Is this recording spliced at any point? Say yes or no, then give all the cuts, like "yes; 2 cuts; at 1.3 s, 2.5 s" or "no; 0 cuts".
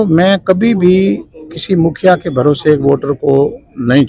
no; 0 cuts